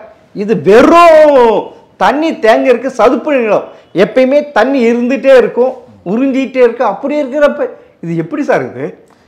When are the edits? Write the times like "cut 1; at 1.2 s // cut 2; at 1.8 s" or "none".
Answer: none